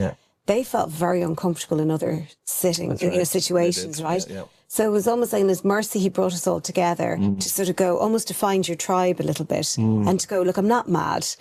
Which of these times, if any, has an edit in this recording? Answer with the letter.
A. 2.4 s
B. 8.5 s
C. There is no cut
C